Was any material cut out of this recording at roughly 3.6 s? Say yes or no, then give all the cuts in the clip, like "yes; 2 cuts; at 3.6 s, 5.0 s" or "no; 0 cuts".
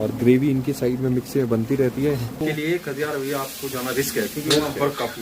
no; 1 cut; at 2.4 s